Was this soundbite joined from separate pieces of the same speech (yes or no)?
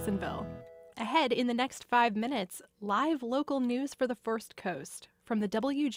no